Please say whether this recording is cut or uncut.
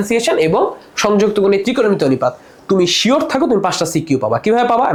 uncut